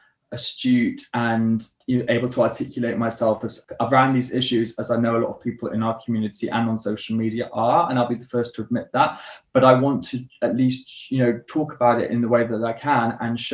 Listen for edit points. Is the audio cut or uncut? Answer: cut